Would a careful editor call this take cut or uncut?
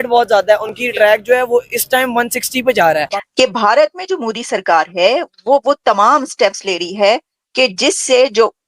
cut